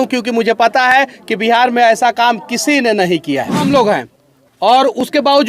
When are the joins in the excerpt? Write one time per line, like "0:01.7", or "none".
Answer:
0:03.6